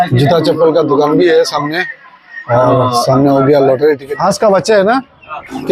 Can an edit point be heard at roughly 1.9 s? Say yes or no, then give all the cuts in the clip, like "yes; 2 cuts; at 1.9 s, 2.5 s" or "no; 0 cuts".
no; 1 cut; at 4.1 s